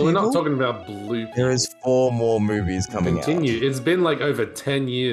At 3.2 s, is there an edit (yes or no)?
yes